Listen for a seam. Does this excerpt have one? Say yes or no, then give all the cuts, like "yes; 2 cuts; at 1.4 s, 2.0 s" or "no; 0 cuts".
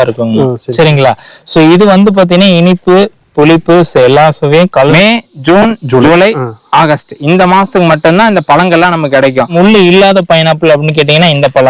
yes; 2 cuts; at 4.9 s, 9.5 s